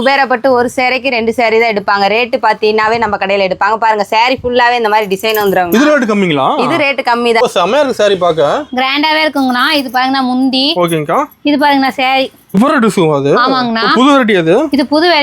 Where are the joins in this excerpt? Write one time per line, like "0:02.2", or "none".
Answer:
0:07.4
0:12.6